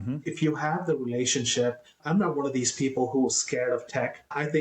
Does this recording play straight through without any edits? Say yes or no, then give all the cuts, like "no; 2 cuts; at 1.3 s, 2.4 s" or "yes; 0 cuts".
no; 1 cut; at 2.1 s